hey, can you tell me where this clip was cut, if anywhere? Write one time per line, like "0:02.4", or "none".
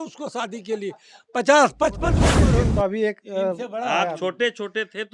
0:02.3